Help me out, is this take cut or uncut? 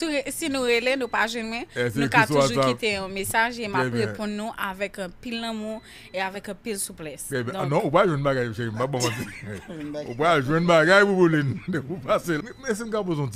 cut